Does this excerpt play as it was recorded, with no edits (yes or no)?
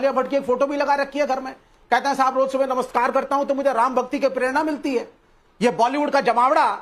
yes